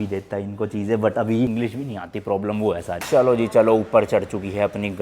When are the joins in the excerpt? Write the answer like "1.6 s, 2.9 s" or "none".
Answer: 1.5 s, 3.0 s